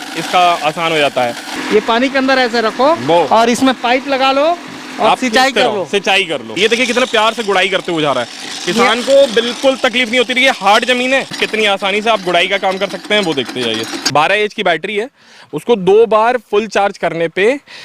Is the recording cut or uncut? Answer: cut